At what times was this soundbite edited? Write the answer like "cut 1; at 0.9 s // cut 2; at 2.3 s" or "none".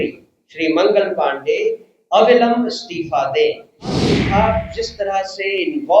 cut 1; at 4.1 s